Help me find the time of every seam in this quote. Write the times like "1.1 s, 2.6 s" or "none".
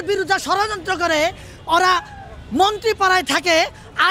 none